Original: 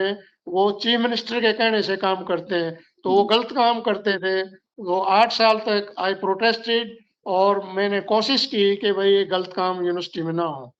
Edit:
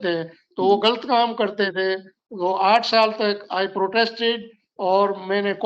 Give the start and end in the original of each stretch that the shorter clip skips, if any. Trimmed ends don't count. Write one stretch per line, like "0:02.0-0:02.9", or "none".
none